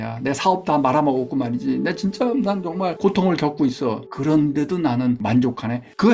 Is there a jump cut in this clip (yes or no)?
yes